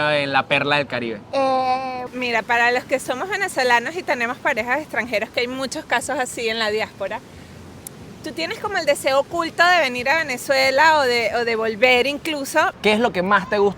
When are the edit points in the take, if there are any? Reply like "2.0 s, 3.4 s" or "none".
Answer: 2.0 s, 12.7 s